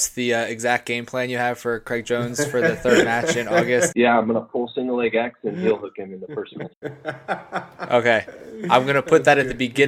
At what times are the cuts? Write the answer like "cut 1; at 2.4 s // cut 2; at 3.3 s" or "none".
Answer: cut 1; at 3.9 s // cut 2; at 6.7 s